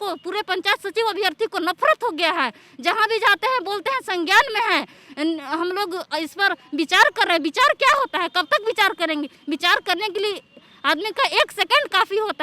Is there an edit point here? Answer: no; 0 cuts

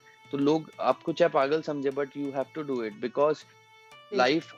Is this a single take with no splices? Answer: yes; 0 cuts

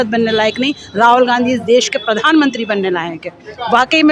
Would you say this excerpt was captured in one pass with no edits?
yes; 0 cuts

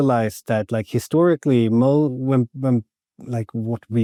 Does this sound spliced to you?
no; 0 cuts

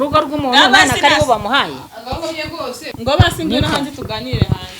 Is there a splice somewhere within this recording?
yes; 1 cut; at 2.9 s

